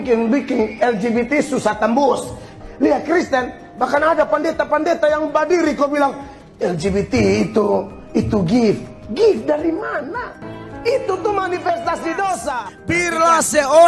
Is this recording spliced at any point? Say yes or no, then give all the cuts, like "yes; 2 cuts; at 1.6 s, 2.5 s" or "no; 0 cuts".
yes; 1 cut; at 12.7 s